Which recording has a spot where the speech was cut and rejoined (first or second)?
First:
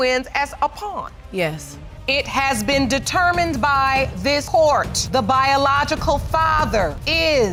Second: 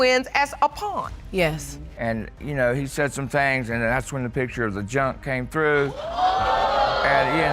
second